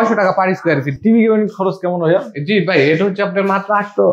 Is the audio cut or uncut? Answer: cut